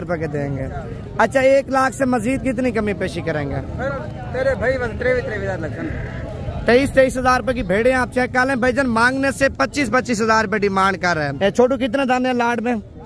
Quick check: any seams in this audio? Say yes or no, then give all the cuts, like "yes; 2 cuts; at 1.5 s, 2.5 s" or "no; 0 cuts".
yes; 1 cut; at 11.3 s